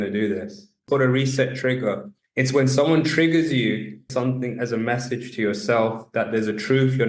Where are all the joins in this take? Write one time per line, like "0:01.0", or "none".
0:00.8
0:02.1
0:04.0

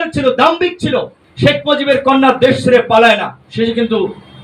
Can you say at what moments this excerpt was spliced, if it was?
none

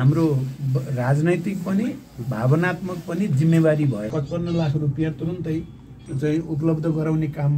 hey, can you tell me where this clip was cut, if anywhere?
0:04.1

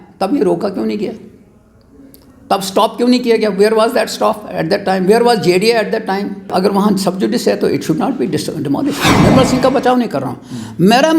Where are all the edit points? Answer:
0:06.5
0:09.1

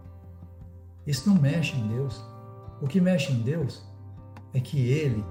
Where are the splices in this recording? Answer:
none

